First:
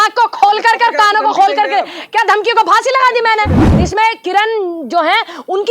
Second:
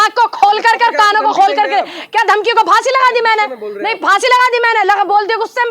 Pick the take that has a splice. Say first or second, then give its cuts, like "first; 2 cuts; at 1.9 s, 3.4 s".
first; 1 cut; at 3.6 s